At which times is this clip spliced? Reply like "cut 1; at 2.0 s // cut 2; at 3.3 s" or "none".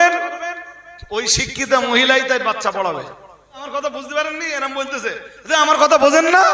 cut 1; at 3.6 s